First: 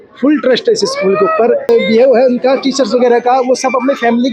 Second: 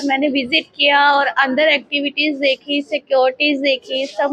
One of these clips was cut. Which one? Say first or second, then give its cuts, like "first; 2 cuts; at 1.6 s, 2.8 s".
first; 1 cut; at 1.7 s